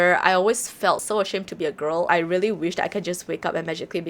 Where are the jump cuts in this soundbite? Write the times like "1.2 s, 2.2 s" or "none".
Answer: 1.0 s